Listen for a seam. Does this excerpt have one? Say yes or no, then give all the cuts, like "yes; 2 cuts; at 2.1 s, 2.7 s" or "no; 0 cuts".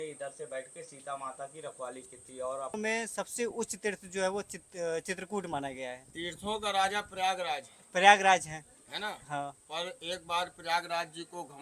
yes; 1 cut; at 2.8 s